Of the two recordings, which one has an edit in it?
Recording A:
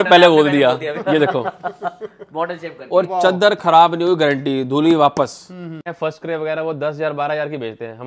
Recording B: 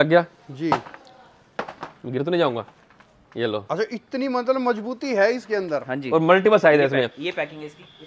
A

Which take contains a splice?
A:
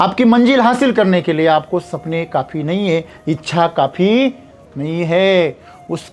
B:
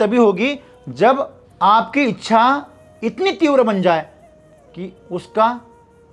B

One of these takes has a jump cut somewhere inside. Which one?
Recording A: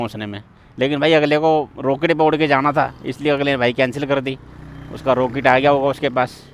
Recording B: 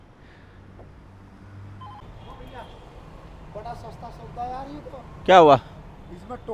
B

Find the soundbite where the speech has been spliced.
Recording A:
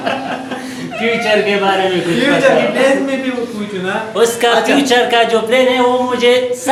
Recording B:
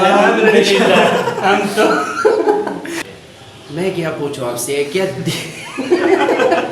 B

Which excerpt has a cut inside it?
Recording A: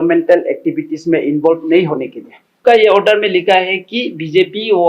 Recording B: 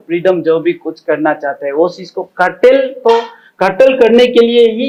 A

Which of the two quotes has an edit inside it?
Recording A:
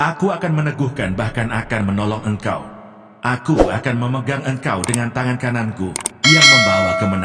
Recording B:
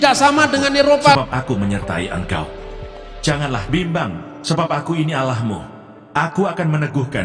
B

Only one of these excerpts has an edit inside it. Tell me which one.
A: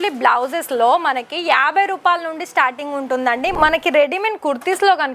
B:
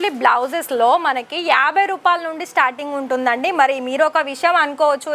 A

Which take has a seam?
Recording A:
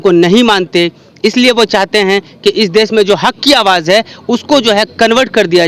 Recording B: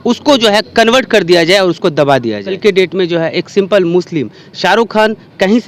B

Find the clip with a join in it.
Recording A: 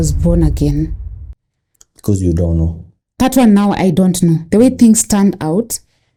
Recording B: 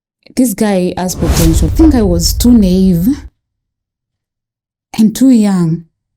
B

